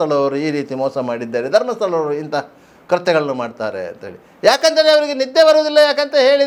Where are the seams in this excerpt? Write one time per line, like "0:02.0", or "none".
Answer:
none